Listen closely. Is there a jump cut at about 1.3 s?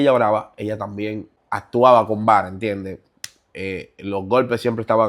yes; 1 cut; at 1.3 s

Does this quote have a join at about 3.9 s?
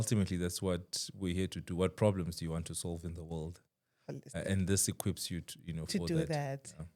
no; 0 cuts

